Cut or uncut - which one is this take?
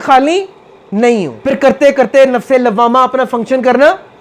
cut